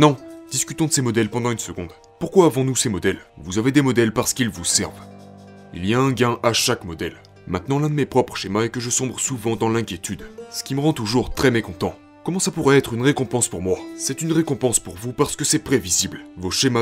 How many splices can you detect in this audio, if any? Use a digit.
0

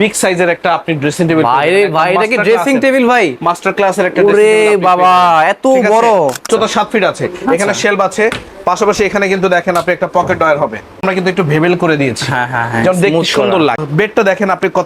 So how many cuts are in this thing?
3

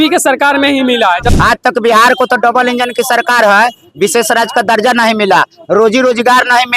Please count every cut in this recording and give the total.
1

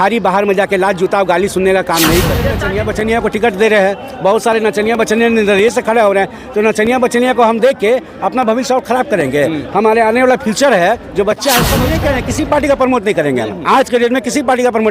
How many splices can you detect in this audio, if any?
2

